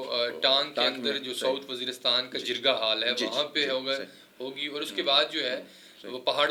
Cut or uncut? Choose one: uncut